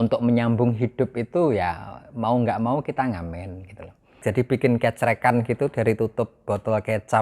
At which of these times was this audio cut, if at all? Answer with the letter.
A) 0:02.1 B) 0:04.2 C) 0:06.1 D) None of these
B